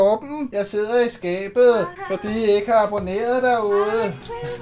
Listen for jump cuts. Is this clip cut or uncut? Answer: uncut